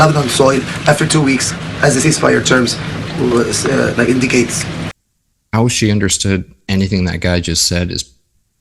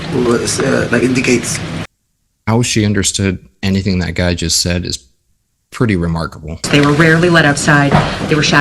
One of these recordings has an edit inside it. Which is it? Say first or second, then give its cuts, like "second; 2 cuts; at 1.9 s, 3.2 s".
second; 1 cut; at 6.6 s